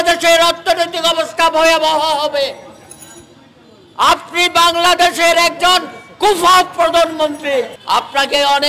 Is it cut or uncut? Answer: cut